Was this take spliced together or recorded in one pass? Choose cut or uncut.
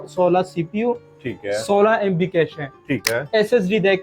cut